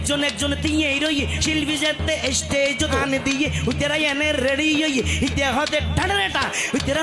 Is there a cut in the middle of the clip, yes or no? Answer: yes